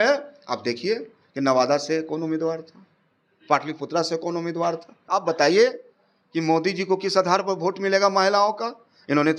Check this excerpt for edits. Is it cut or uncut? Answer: cut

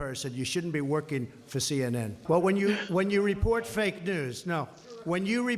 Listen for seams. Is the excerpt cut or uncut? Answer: cut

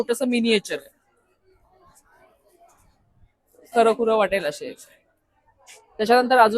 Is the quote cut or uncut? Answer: uncut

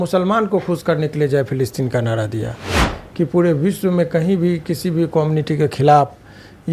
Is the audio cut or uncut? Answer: cut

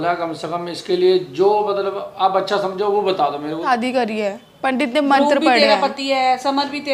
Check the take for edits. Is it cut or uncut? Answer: cut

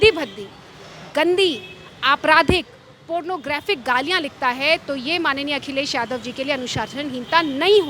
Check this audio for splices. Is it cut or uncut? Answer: uncut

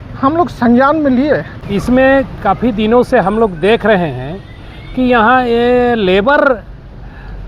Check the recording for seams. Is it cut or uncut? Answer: cut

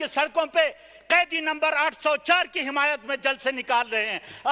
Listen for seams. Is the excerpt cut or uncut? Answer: uncut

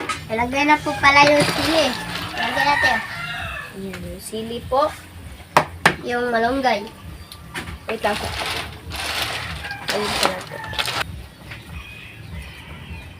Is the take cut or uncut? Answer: cut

